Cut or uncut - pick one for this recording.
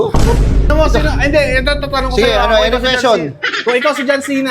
uncut